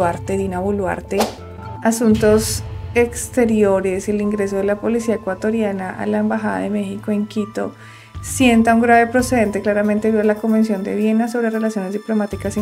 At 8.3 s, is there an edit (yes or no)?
no